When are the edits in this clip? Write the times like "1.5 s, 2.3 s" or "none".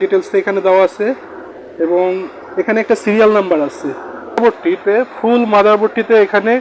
4.4 s